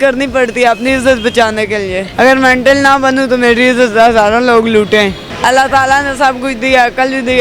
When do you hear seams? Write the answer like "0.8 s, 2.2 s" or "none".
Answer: 2.0 s, 5.3 s